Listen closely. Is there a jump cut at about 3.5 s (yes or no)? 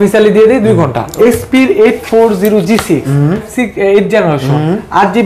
yes